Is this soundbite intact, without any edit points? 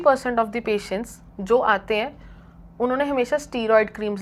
yes; 0 cuts

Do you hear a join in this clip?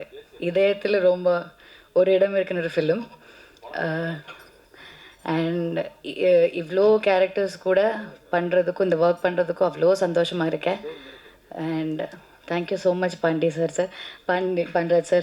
no; 0 cuts

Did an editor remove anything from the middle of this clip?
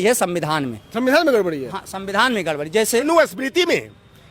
yes; 1 cut; at 3.1 s

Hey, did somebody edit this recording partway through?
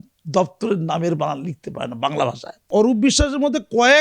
yes; 1 cut; at 2.7 s

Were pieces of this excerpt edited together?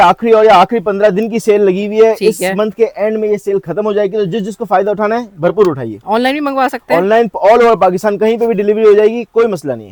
no; 0 cuts

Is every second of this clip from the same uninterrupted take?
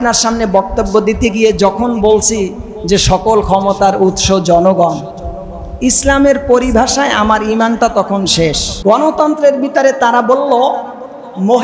no; 1 cut; at 8.7 s

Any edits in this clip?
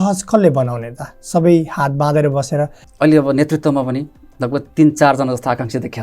yes; 1 cut; at 2.8 s

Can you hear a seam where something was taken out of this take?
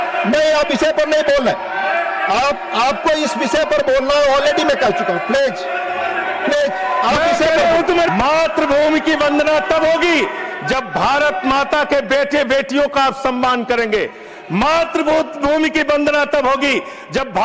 yes; 1 cut; at 8.1 s

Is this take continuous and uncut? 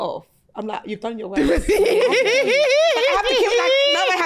yes; 0 cuts

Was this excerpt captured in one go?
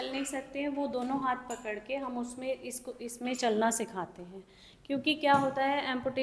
yes; 0 cuts

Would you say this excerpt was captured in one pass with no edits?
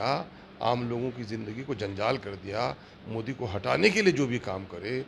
yes; 0 cuts

